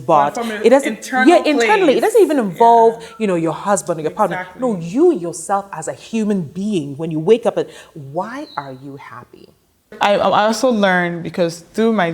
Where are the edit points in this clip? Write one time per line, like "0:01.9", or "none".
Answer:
0:09.9